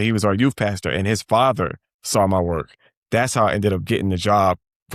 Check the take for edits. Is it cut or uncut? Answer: uncut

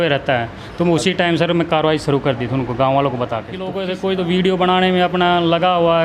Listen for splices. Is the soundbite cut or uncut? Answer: cut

